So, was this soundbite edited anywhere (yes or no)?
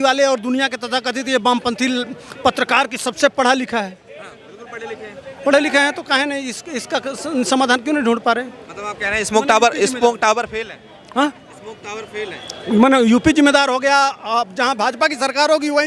no